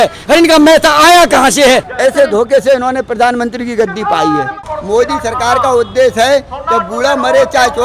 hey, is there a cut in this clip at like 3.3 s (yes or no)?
no